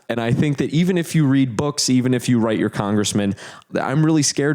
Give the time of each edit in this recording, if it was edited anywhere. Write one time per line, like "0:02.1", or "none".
none